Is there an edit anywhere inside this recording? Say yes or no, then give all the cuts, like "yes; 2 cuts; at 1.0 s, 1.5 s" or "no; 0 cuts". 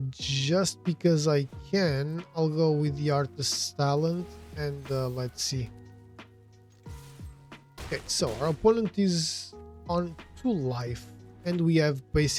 no; 0 cuts